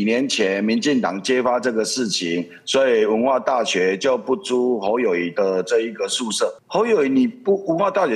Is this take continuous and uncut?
no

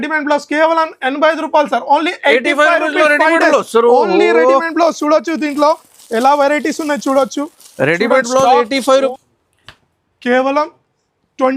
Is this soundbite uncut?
no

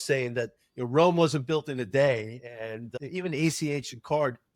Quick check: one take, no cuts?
yes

